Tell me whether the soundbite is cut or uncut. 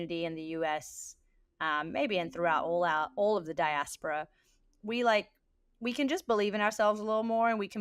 uncut